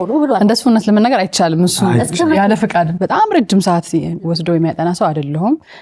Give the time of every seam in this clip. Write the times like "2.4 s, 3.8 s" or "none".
2.9 s